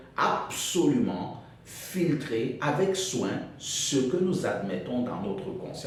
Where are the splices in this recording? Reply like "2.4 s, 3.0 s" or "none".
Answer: none